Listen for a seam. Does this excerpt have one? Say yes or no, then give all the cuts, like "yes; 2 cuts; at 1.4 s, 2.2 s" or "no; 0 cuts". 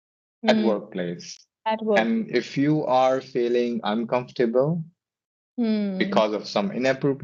no; 0 cuts